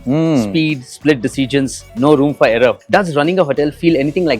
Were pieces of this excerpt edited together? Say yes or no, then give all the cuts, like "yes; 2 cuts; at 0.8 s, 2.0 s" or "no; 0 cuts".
no; 0 cuts